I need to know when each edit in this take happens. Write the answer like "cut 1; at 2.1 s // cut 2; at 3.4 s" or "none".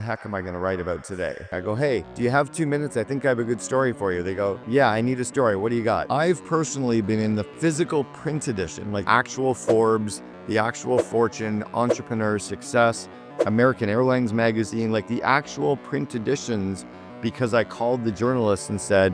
cut 1; at 1.5 s // cut 2; at 6.0 s // cut 3; at 9.0 s